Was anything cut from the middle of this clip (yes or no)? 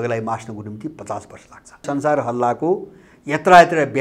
yes